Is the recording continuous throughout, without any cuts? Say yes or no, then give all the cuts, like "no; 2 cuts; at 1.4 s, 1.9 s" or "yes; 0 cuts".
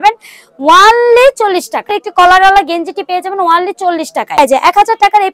no; 2 cuts; at 2.0 s, 4.4 s